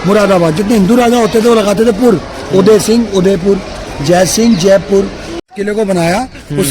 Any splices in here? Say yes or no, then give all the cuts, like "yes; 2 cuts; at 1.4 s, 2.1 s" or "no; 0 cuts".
yes; 1 cut; at 5.3 s